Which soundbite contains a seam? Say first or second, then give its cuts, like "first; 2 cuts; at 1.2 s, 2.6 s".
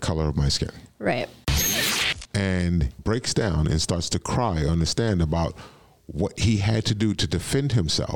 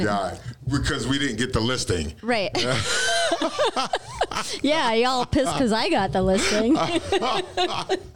first; 2 cuts; at 1.8 s, 2.9 s